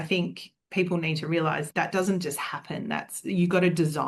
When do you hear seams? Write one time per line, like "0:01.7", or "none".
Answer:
0:01.6